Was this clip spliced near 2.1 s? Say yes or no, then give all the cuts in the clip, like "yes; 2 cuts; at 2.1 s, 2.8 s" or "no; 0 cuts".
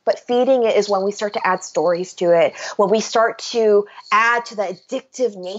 no; 0 cuts